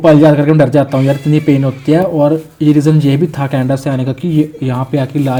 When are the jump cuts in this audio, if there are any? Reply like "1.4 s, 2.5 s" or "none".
none